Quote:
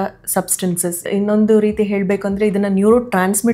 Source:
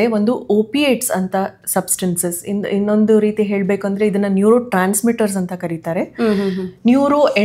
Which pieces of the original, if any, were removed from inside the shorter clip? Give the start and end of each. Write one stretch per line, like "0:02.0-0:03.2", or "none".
0:02.4-0:02.6